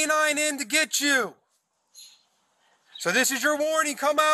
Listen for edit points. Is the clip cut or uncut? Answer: uncut